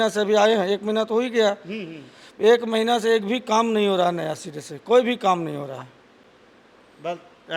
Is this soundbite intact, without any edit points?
yes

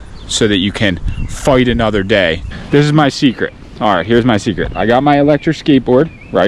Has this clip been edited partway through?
yes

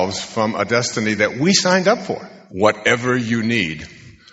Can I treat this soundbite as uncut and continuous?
no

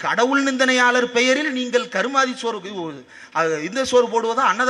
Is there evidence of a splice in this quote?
no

